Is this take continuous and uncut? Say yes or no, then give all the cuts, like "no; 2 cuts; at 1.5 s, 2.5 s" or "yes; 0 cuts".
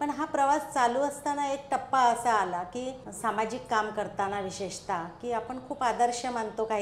no; 1 cut; at 3.0 s